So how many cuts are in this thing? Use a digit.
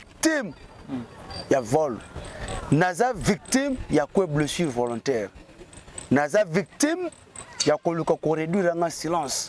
0